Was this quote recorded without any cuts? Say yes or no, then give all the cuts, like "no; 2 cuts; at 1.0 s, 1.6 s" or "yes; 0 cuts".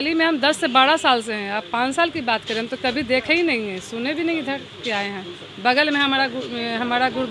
yes; 0 cuts